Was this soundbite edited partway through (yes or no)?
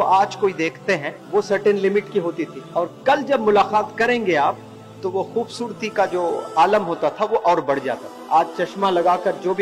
yes